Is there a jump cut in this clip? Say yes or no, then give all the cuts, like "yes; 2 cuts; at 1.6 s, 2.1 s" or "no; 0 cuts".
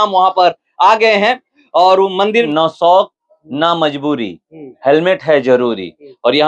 yes; 1 cut; at 2.5 s